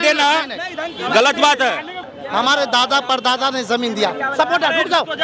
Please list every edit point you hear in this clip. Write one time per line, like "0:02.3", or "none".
0:02.0